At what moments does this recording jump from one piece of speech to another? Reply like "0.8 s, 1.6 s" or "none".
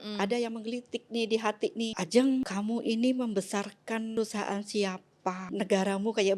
1.9 s, 2.5 s, 4.1 s, 5.4 s